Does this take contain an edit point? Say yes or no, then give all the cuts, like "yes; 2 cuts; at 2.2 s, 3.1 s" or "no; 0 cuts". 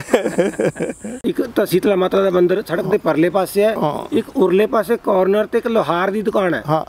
yes; 1 cut; at 1.1 s